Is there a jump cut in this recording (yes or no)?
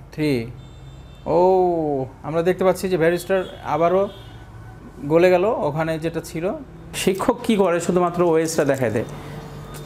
yes